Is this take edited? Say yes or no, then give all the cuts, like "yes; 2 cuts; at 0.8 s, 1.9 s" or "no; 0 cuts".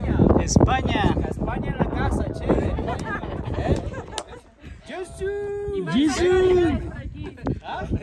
no; 0 cuts